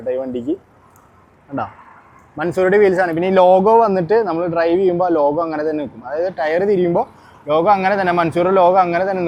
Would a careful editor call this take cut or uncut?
uncut